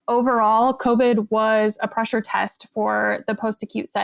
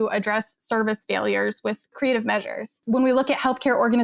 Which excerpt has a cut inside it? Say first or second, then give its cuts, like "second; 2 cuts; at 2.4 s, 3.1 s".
second; 2 cuts; at 1.9 s, 2.7 s